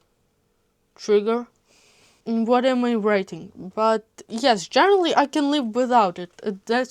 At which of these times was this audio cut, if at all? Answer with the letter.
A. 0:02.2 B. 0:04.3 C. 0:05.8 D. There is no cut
A